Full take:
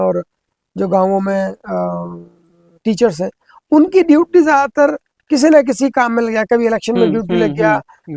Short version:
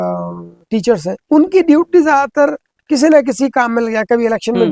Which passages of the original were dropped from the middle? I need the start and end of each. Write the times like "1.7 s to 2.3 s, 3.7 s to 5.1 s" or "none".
2.7 s to 3.4 s